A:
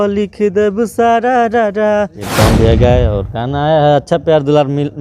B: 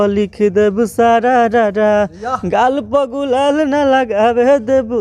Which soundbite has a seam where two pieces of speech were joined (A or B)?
A